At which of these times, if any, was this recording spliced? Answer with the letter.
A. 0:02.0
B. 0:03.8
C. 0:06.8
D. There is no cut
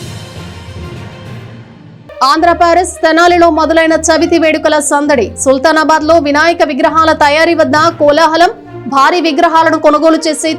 A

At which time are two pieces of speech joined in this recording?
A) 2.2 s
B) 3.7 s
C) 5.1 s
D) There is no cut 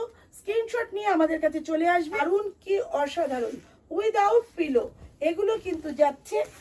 A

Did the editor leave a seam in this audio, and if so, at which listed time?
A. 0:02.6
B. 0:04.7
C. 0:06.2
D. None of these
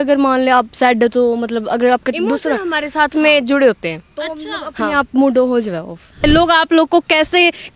C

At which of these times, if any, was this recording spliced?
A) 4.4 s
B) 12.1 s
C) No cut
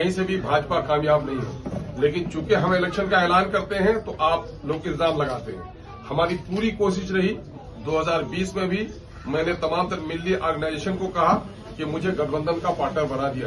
C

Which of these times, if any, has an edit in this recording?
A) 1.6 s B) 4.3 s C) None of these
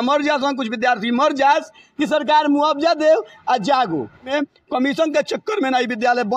B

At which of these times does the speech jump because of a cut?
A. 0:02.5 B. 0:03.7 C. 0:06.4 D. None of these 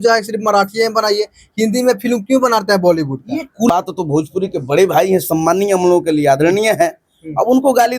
B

